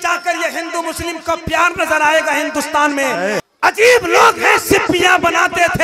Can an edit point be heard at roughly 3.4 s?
yes; 1 cut; at 3.4 s

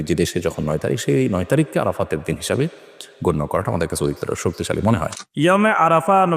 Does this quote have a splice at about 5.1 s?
yes; 1 cut; at 5.1 s

